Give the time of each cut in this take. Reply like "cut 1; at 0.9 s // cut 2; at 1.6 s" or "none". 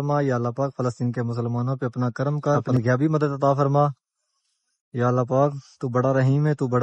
cut 1; at 2.6 s